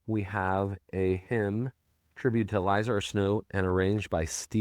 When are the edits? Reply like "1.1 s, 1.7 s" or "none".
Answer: none